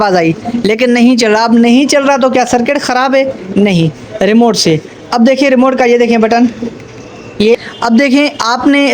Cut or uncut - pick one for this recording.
cut